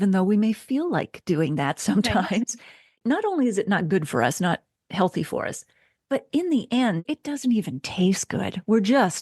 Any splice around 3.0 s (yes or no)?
yes